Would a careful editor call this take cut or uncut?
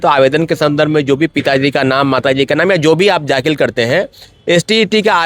uncut